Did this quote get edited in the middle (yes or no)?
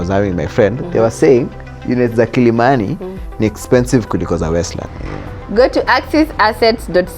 yes